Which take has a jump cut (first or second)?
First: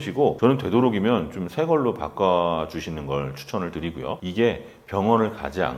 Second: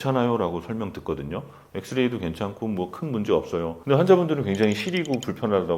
first